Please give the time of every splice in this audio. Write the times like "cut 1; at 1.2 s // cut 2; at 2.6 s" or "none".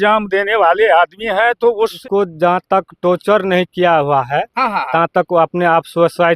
cut 1; at 2.0 s